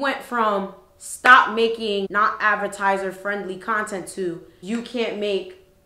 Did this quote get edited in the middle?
no; 0 cuts

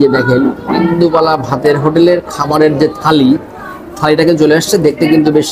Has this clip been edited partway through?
no; 0 cuts

